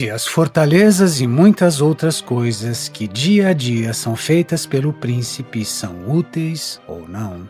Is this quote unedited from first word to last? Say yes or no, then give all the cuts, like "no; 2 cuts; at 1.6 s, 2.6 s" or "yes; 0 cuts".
yes; 0 cuts